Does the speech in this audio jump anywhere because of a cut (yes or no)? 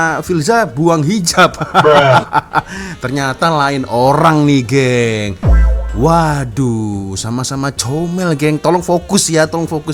no